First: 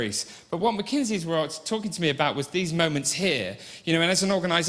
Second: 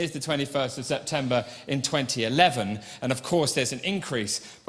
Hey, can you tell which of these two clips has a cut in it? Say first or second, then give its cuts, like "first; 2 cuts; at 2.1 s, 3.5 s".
first; 1 cut; at 2.1 s